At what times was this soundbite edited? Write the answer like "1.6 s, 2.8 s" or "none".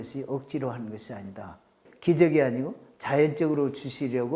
1.7 s